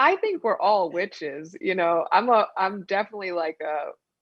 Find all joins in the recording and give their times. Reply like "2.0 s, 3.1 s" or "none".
none

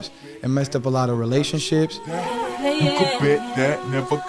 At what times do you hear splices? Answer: 2.2 s

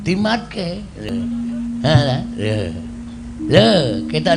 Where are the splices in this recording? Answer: 1.0 s

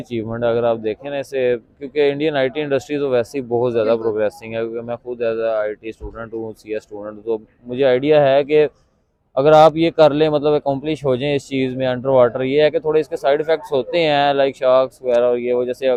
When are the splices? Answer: none

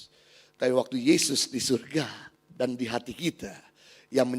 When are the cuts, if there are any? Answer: none

